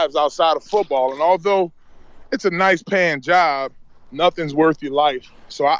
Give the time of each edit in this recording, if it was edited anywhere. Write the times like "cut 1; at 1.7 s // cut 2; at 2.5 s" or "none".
none